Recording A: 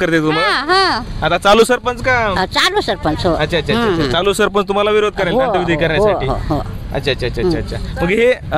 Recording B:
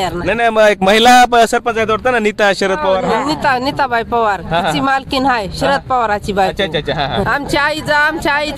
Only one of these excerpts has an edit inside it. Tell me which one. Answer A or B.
B